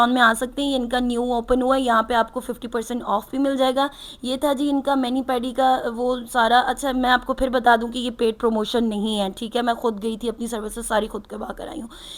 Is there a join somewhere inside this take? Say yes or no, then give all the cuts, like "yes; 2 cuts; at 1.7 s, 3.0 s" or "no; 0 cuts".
no; 0 cuts